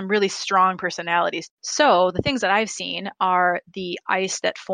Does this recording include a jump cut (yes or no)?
yes